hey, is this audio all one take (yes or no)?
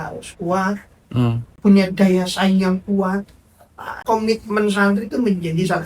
no